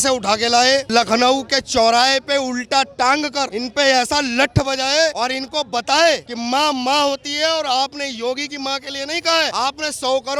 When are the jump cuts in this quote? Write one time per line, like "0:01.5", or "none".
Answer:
none

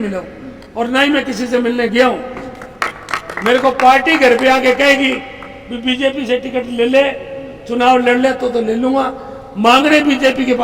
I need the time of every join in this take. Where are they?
none

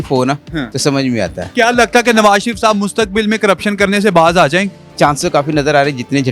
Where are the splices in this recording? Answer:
0:01.4
0:04.8

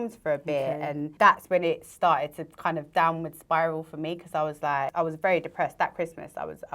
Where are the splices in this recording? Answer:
0:01.1
0:04.9

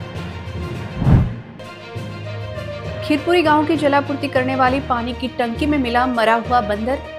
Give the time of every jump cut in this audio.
0:01.4

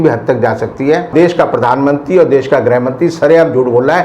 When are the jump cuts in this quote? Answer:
0:01.1

